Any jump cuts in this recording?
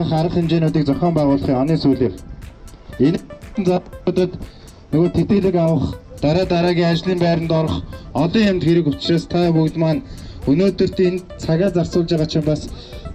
no; 0 cuts

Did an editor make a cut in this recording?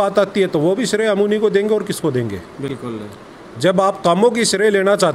no; 0 cuts

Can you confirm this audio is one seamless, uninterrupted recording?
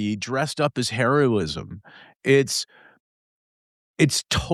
yes; 0 cuts

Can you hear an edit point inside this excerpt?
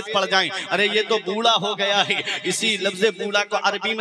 no; 0 cuts

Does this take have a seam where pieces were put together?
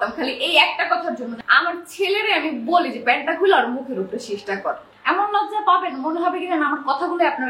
yes; 2 cuts; at 1.3 s, 4.9 s

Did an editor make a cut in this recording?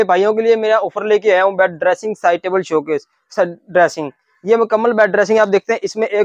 no; 0 cuts

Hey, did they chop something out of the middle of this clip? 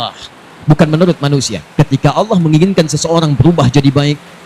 yes; 1 cut; at 1.6 s

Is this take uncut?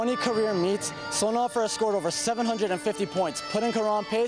yes; 0 cuts

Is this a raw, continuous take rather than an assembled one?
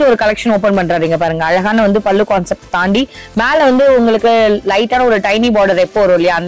yes; 0 cuts

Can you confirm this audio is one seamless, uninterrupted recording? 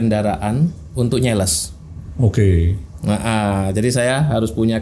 yes; 0 cuts

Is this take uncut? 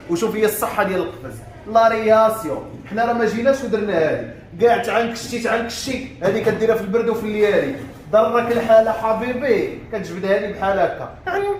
yes; 0 cuts

